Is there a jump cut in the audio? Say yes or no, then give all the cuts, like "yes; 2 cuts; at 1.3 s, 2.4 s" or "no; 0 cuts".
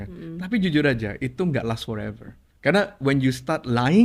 no; 0 cuts